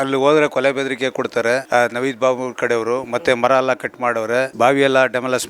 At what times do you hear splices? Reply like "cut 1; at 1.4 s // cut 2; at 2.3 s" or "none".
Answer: cut 1; at 4.5 s